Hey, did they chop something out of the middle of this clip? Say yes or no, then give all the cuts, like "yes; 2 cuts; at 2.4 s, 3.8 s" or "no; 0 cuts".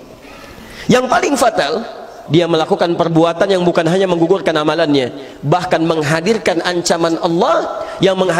yes; 1 cut; at 2.1 s